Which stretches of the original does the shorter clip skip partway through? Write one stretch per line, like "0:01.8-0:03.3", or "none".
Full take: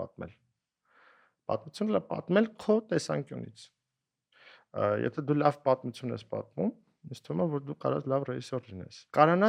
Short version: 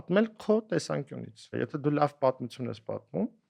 0:03.7-0:05.0